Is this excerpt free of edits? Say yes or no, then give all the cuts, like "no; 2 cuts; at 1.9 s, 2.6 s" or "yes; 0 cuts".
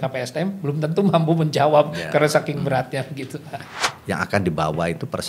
no; 1 cut; at 3.7 s